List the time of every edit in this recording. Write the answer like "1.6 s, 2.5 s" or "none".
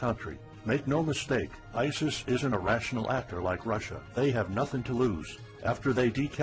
2.4 s